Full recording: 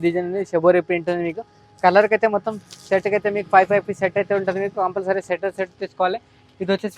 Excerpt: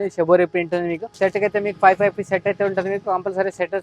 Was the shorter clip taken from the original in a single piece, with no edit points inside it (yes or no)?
no